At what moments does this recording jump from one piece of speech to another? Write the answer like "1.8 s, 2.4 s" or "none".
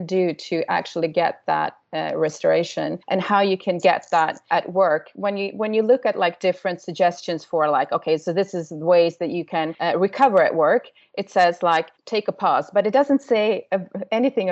3.0 s, 4.4 s, 9.8 s, 12.0 s